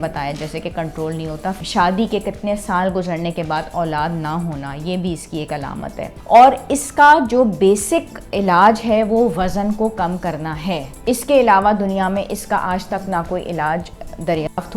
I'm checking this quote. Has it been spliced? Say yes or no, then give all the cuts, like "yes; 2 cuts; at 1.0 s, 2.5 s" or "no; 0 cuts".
yes; 3 cuts; at 1.6 s, 6.2 s, 10.9 s